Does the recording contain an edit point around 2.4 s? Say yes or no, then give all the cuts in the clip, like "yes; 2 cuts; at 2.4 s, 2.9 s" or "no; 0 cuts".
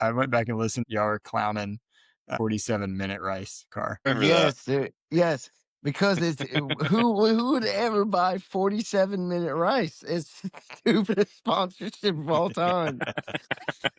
yes; 3 cuts; at 0.8 s, 2.4 s, 4.1 s